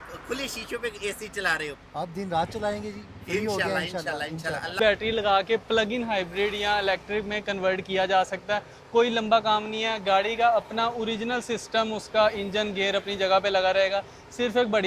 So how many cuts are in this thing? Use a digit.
1